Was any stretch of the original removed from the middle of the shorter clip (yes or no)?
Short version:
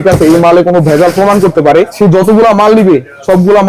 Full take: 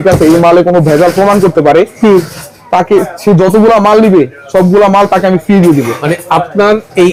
yes